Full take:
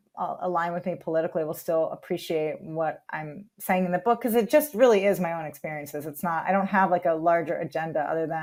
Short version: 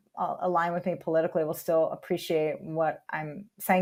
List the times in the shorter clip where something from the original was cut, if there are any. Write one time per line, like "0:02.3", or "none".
none